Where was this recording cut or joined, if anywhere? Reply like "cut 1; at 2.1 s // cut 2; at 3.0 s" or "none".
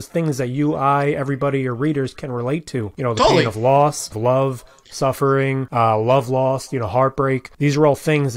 cut 1; at 2.9 s // cut 2; at 4.1 s // cut 3; at 5.6 s // cut 4; at 7.5 s